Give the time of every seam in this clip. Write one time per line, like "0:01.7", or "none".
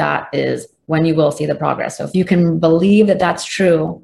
0:02.2